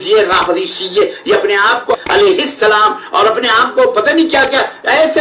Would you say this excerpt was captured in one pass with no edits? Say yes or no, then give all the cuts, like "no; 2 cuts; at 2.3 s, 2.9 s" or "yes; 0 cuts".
no; 1 cut; at 2.0 s